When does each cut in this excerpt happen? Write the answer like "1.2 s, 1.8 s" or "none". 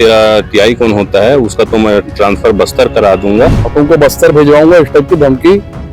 3.6 s